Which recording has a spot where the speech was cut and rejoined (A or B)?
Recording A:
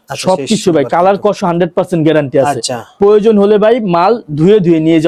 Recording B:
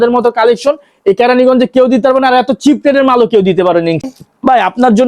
B